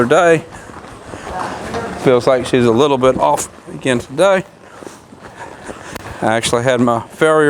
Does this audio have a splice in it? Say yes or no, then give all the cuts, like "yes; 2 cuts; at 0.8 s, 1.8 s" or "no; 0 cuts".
no; 0 cuts